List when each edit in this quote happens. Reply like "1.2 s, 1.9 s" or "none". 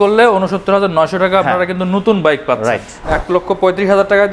3.1 s